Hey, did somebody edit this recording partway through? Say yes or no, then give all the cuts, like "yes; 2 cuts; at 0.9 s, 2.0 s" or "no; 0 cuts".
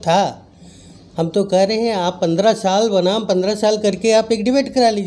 no; 0 cuts